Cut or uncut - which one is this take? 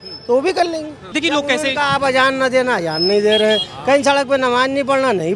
cut